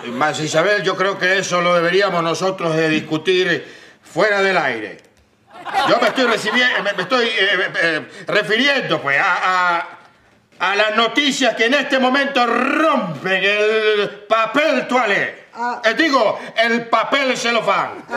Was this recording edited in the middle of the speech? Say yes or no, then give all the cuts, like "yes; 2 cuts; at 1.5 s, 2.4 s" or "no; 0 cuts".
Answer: no; 0 cuts